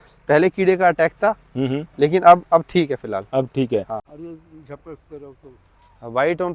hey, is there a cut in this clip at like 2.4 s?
no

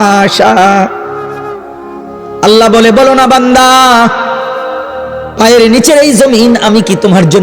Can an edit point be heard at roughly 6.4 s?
no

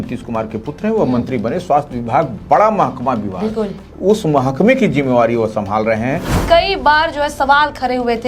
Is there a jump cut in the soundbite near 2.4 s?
no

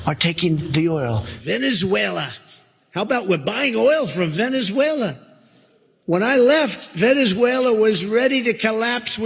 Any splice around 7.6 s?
no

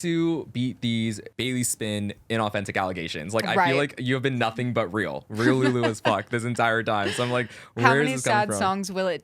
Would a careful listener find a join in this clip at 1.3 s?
yes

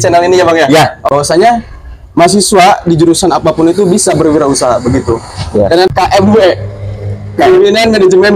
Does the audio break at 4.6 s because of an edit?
no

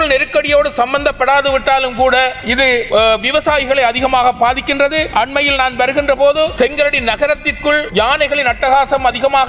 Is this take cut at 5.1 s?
yes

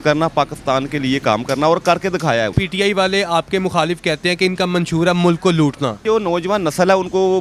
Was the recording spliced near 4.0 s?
no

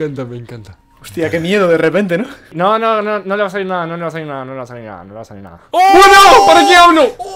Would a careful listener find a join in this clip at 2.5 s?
yes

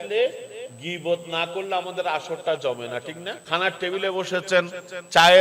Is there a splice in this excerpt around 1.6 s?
no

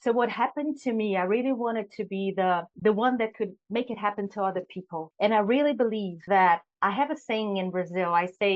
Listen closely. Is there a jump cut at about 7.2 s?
no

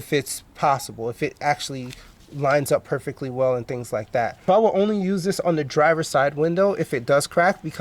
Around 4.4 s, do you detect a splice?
no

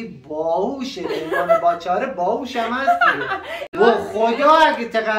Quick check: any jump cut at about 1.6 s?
no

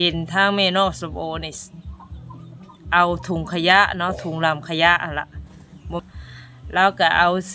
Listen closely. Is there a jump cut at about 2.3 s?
no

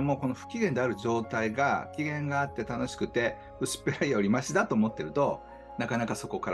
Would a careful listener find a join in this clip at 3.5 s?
no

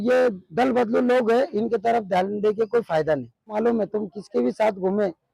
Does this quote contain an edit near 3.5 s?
yes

